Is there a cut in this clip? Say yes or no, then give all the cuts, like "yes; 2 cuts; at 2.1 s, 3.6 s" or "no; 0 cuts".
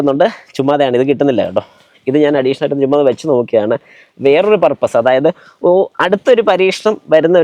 no; 0 cuts